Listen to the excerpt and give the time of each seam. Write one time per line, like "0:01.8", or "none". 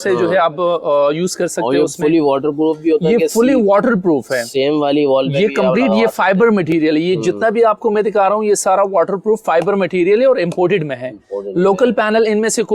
none